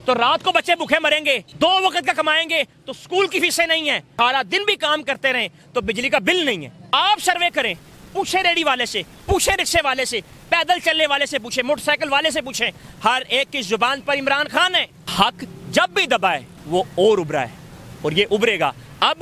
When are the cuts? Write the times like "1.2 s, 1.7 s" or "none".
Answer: 1.5 s, 4.1 s, 6.9 s, 15.0 s, 16.5 s